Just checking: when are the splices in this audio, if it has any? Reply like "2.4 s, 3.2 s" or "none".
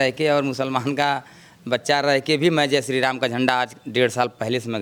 none